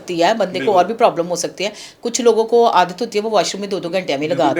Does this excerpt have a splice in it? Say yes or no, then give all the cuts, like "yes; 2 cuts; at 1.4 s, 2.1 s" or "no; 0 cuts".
no; 0 cuts